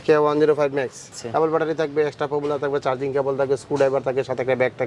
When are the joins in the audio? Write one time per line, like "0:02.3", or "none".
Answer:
0:01.2